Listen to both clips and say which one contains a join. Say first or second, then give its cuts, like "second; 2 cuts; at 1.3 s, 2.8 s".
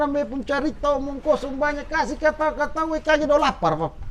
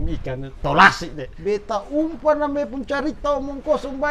second; 1 cut; at 1.3 s